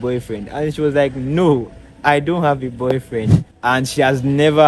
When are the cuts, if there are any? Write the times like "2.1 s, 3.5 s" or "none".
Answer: 3.4 s